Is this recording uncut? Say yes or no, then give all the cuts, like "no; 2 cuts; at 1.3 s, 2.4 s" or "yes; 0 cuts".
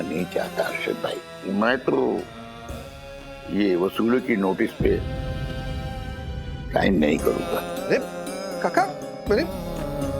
no; 4 cuts; at 1.3 s, 5.0 s, 6.7 s, 7.5 s